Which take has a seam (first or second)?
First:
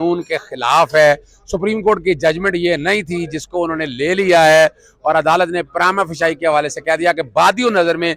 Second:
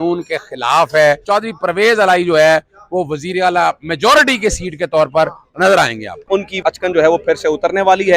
second